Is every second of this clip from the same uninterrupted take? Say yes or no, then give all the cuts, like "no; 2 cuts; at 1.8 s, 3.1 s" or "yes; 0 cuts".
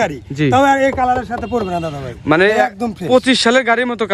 yes; 0 cuts